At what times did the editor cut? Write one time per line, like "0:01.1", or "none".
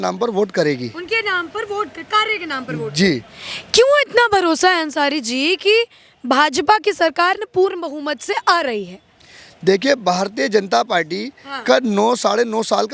none